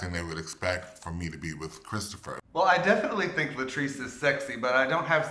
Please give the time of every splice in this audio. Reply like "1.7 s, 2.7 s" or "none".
2.6 s

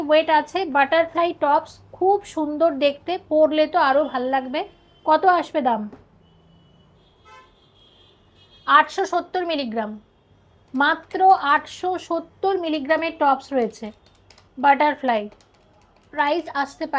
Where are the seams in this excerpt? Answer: none

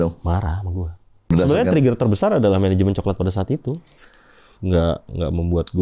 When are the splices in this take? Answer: 1.3 s

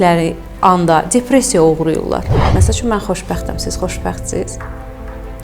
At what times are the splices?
2.4 s

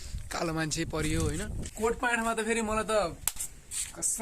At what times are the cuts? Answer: 1.7 s

